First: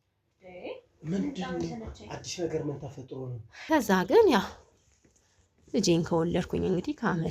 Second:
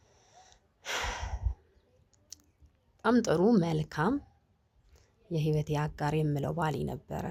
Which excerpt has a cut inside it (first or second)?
first